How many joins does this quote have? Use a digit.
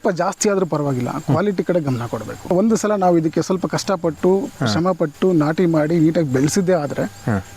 1